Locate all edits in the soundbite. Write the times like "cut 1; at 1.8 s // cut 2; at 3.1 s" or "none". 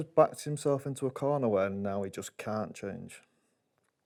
none